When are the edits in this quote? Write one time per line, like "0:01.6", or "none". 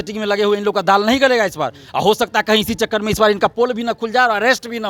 none